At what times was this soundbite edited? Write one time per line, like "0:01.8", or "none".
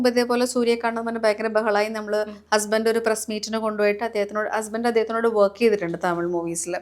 none